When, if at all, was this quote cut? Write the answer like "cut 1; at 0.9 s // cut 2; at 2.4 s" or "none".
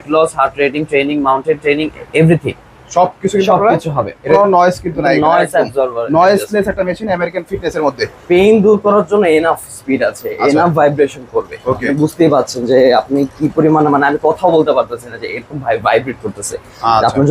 cut 1; at 4.3 s // cut 2; at 8.1 s